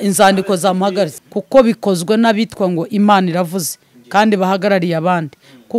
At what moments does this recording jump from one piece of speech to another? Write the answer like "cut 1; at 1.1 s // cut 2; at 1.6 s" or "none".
cut 1; at 1.2 s